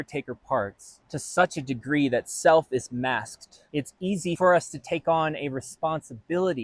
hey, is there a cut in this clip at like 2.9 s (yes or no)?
no